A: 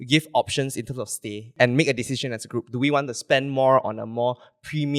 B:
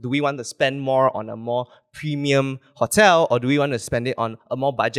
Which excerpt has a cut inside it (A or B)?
A